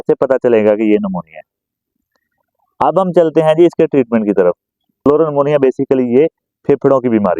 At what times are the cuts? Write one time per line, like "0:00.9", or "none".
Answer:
0:05.0